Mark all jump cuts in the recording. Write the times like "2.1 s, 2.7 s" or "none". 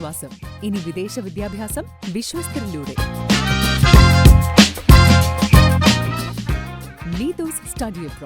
none